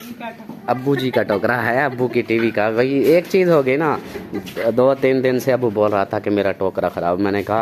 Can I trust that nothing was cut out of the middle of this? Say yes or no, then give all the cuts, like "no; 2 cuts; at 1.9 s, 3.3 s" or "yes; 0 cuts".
yes; 0 cuts